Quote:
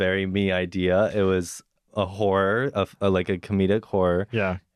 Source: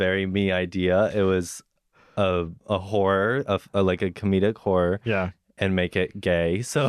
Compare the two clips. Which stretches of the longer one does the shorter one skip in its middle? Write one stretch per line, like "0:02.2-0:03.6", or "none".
0:01.8-0:02.5